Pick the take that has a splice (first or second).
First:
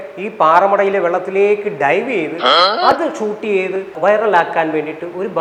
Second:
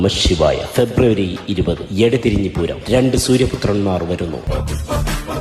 second